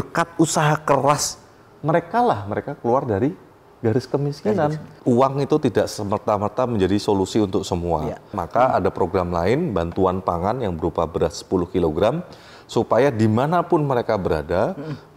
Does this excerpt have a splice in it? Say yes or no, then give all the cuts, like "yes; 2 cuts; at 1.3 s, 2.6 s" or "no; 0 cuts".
yes; 2 cuts; at 4.9 s, 8.4 s